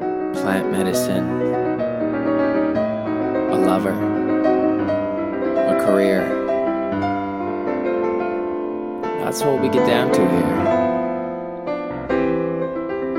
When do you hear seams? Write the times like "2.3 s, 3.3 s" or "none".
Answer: none